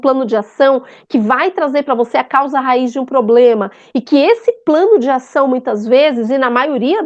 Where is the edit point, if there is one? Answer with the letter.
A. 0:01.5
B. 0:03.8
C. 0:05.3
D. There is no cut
D